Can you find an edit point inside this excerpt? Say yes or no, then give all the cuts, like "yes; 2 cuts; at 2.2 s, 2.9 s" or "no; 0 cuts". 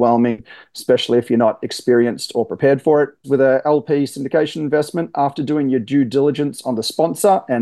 yes; 1 cut; at 3.2 s